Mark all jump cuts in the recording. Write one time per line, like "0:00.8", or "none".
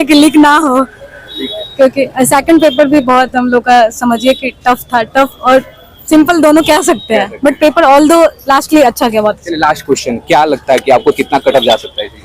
none